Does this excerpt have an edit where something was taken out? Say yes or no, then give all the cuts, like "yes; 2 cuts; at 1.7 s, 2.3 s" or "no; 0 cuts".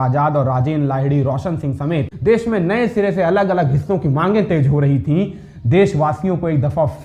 yes; 1 cut; at 2.1 s